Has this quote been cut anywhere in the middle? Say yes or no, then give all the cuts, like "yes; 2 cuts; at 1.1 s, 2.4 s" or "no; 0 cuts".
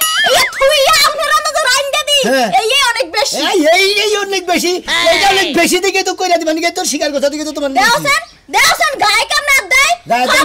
no; 0 cuts